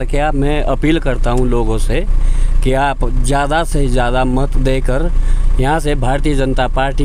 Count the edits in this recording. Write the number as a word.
zero